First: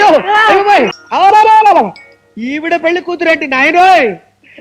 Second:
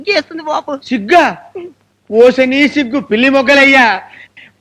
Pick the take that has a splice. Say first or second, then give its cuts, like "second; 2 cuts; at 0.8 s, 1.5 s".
first; 1 cut; at 1.0 s